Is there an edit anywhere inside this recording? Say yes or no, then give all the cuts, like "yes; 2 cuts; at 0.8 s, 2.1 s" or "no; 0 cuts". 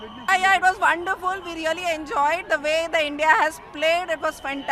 no; 0 cuts